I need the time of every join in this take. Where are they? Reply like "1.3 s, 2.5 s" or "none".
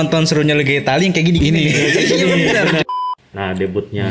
2.8 s